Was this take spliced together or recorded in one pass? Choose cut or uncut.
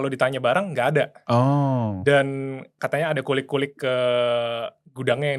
cut